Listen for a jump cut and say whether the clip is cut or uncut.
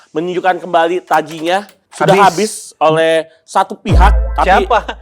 cut